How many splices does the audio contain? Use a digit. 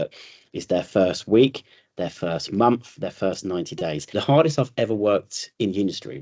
1